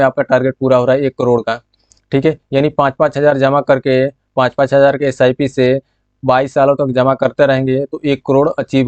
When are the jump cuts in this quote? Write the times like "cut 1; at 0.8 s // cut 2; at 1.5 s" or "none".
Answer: none